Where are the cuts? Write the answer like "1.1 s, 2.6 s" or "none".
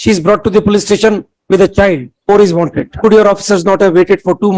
2.1 s, 2.9 s